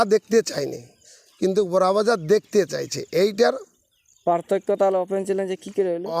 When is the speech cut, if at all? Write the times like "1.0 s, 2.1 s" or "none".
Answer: none